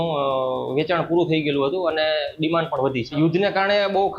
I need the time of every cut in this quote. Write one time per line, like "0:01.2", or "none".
0:03.1